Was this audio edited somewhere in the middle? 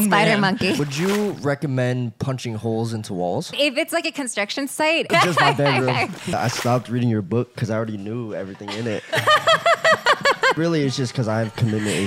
yes; 5 cuts; at 0.8 s, 3.5 s, 5.1 s, 6.3 s, 10.6 s

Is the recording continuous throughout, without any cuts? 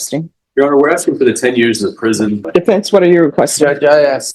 no; 1 cut; at 2.4 s

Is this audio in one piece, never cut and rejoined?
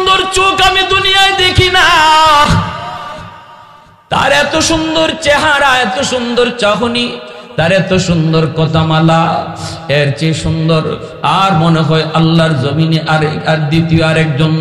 yes; 0 cuts

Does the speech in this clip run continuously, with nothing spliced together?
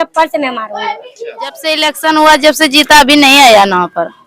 no; 1 cut; at 1.6 s

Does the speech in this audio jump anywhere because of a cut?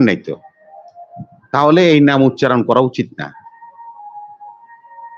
no; 0 cuts

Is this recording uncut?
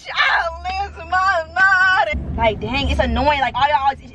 no; 1 cut; at 2.1 s

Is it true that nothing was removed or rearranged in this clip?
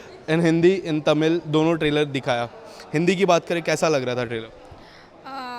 yes; 0 cuts

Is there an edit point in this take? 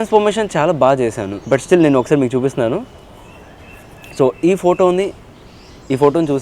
yes; 1 cut; at 1.3 s

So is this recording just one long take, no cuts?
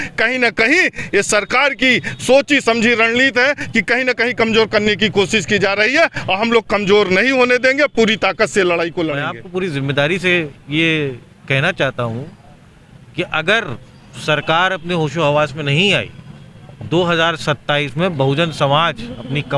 no; 1 cut; at 9.3 s

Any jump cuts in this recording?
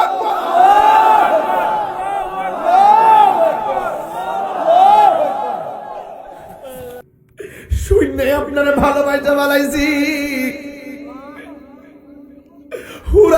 yes; 1 cut; at 7.0 s

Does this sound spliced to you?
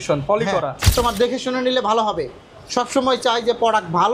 yes; 1 cut; at 0.9 s

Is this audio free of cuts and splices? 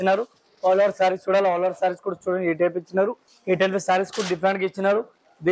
no; 1 cut; at 3.3 s

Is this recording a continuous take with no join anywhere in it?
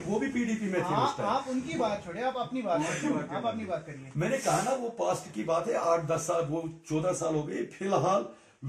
yes; 0 cuts

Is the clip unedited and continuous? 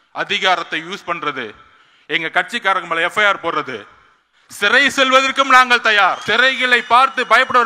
no; 1 cut; at 6.2 s

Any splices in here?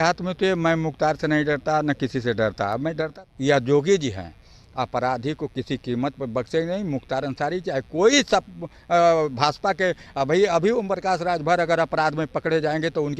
yes; 1 cut; at 3.2 s

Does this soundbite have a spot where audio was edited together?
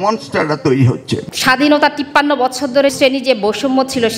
yes; 2 cuts; at 1.3 s, 2.9 s

